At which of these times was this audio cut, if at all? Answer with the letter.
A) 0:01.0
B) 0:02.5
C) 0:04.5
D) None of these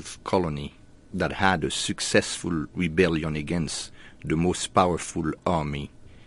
A